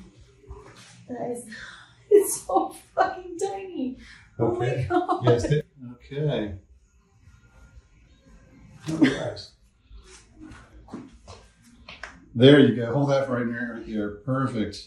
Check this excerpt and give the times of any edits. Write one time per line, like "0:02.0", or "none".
none